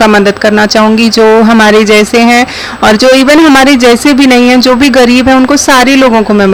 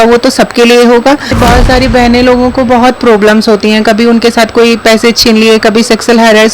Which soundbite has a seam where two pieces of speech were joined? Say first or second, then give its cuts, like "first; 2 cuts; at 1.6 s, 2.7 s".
second; 1 cut; at 1.3 s